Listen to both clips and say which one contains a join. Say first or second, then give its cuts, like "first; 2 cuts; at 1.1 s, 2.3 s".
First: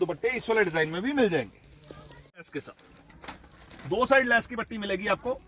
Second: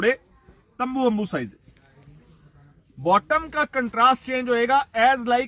first; 1 cut; at 2.6 s